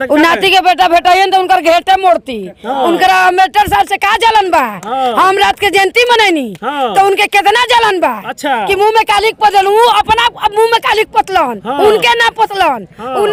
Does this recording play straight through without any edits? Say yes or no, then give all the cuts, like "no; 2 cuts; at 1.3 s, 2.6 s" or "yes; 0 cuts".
yes; 0 cuts